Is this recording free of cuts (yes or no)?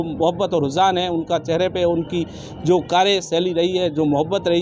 yes